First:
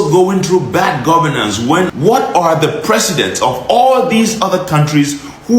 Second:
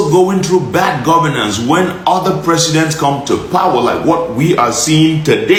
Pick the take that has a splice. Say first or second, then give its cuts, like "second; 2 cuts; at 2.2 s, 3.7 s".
first; 1 cut; at 1.9 s